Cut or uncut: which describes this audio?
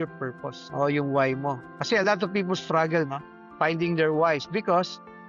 uncut